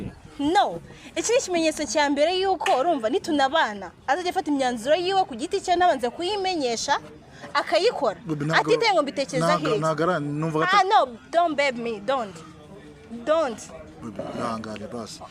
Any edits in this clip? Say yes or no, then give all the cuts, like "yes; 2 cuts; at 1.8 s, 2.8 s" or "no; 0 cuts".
no; 0 cuts